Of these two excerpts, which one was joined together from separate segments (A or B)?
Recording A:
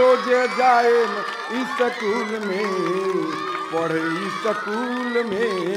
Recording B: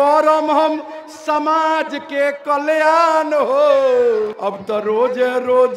B